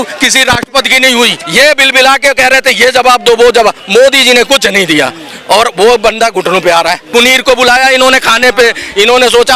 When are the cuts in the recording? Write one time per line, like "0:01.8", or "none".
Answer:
0:01.4
0:07.1